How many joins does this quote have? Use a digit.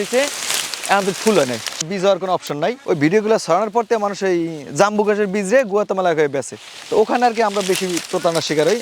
1